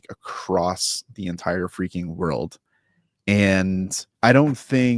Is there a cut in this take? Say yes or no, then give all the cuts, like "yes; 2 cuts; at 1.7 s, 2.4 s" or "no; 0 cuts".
yes; 1 cut; at 4.0 s